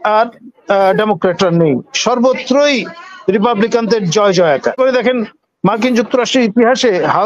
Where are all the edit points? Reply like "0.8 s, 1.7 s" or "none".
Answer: 4.8 s